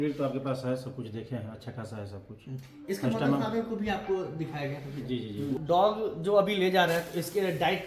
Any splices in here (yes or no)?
yes